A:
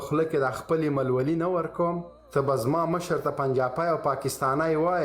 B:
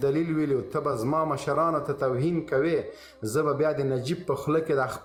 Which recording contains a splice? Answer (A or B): A